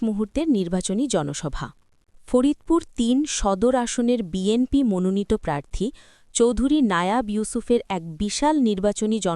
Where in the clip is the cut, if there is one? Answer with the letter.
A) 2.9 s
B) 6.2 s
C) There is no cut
C